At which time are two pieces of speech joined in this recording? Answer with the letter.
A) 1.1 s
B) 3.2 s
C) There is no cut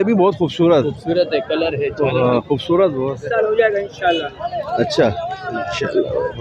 B